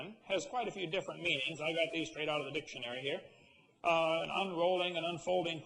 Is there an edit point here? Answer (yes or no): no